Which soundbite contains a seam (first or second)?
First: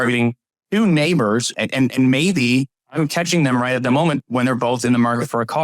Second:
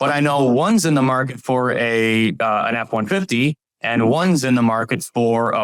first